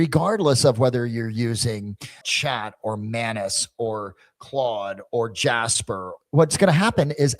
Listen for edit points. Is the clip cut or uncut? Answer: cut